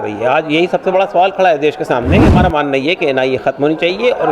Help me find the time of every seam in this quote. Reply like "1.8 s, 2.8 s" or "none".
2.3 s